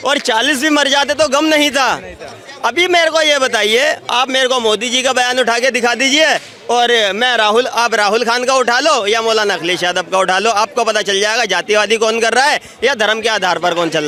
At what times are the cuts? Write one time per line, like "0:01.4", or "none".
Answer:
none